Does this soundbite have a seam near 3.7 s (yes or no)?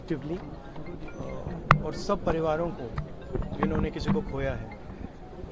no